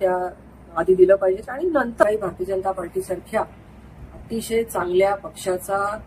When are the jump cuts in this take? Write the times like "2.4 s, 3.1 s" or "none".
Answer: 2.0 s

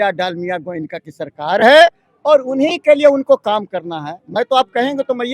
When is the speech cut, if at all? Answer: none

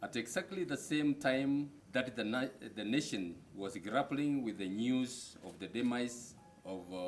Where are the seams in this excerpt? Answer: 1.8 s

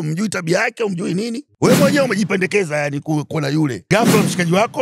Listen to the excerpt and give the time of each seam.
1.4 s, 3.8 s

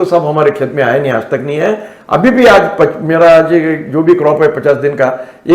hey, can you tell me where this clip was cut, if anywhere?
none

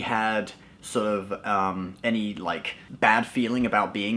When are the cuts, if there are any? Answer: 2.8 s

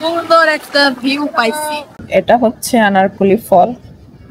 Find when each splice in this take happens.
2.0 s

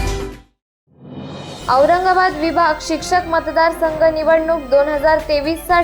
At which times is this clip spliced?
1.5 s

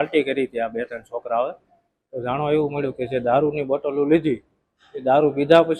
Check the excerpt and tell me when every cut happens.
none

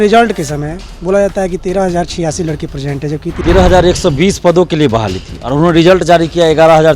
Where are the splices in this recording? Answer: 3.3 s

